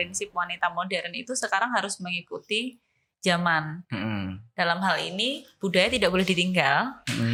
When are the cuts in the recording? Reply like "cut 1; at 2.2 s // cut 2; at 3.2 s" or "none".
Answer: none